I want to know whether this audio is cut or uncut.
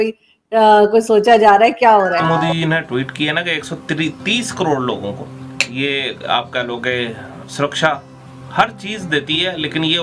cut